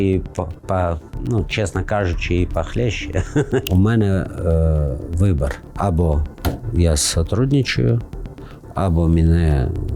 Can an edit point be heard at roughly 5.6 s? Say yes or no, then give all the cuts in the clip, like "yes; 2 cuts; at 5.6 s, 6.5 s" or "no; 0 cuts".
yes; 2 cuts; at 3.7 s, 5.6 s